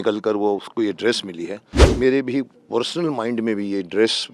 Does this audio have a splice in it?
yes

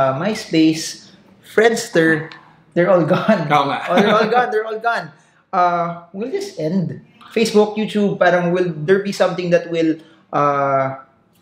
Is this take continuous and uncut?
yes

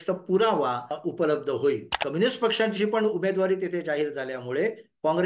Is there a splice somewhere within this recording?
yes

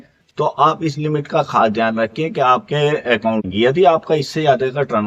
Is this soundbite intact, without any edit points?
no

